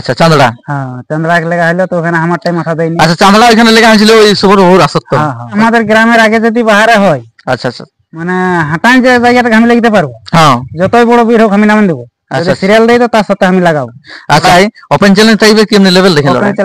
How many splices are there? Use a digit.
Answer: 2